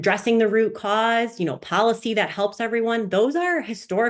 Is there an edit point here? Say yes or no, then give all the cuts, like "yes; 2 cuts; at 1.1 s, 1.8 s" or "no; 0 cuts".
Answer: no; 0 cuts